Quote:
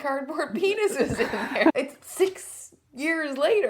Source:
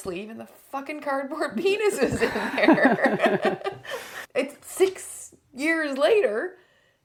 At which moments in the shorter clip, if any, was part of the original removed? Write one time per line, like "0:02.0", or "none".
0:01.7